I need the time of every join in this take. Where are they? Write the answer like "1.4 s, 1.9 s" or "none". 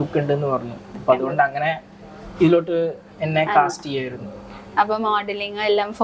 none